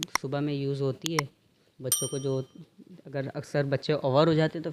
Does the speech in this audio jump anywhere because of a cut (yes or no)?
no